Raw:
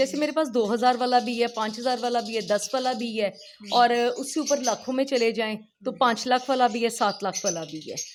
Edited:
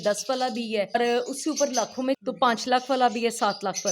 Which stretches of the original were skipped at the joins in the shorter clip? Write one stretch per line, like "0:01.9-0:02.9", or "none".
0:03.4-0:03.8
0:05.1-0:05.8